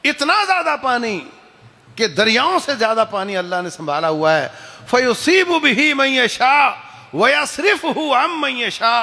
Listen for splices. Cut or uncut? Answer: uncut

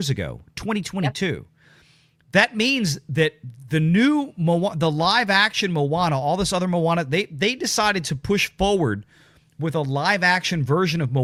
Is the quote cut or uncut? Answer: uncut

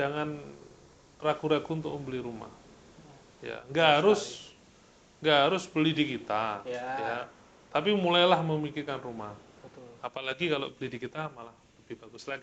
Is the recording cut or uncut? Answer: uncut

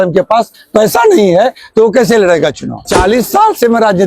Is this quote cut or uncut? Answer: cut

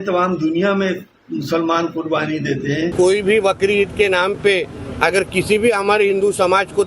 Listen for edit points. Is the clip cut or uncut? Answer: cut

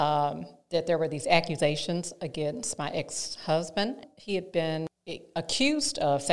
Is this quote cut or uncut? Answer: cut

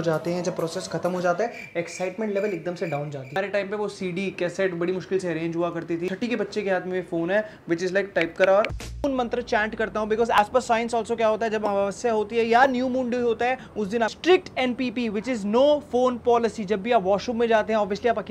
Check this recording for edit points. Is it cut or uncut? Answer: cut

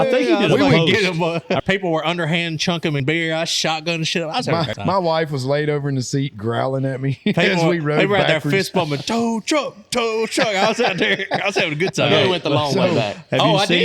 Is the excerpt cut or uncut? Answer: cut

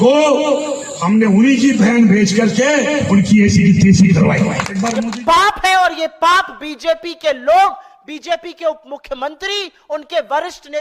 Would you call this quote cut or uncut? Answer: cut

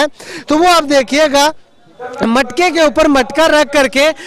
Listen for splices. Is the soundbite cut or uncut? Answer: uncut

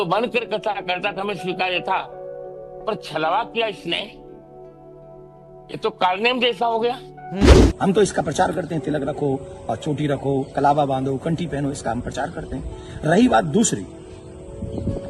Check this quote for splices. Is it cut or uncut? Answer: cut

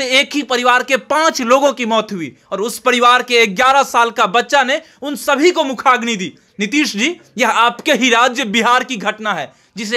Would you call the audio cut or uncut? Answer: uncut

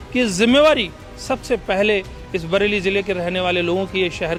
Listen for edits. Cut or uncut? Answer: uncut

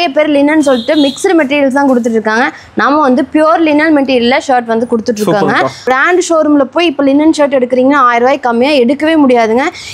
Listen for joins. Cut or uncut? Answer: cut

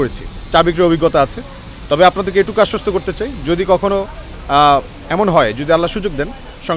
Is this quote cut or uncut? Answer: uncut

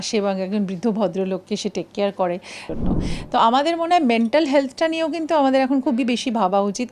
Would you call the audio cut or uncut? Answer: cut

